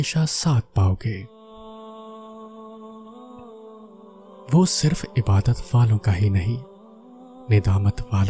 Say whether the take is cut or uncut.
cut